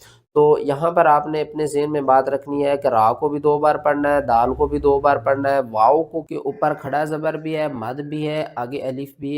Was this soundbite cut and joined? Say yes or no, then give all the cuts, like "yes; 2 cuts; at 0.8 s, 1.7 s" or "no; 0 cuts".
yes; 1 cut; at 6.2 s